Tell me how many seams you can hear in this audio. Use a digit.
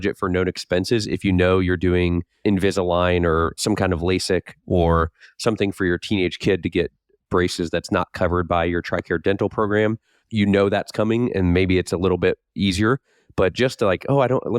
1